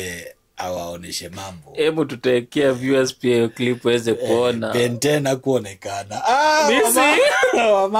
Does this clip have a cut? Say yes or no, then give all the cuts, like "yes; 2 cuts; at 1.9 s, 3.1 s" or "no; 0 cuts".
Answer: yes; 1 cut; at 5.0 s